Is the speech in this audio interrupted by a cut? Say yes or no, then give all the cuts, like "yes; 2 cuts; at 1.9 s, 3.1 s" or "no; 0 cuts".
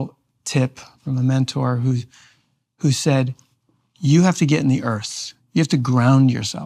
yes; 1 cut; at 1.0 s